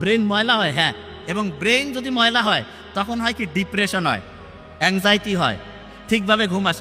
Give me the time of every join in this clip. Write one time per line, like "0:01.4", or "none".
none